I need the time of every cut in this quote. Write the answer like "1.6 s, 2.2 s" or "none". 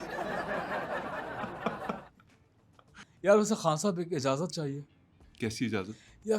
none